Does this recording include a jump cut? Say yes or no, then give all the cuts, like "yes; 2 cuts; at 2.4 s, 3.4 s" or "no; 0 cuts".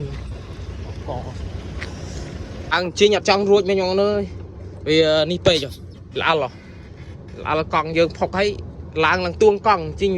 yes; 1 cut; at 2.7 s